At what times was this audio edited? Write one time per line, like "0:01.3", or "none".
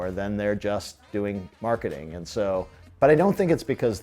0:01.0
0:02.9